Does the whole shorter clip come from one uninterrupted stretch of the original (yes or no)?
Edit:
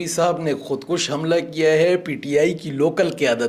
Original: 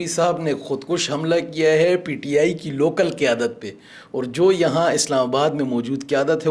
yes